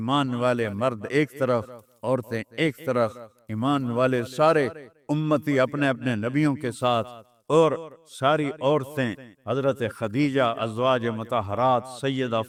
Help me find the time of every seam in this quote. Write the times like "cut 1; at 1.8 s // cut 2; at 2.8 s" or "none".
none